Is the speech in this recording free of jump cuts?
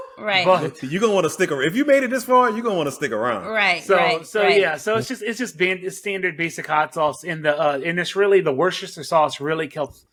yes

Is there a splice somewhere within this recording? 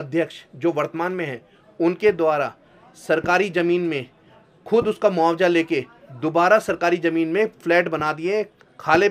no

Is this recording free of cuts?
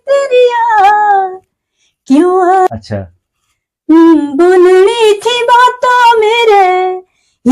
no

